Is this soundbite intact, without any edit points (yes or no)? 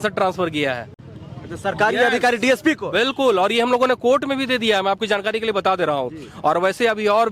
yes